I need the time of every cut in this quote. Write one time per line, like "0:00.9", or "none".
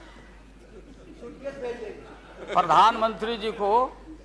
none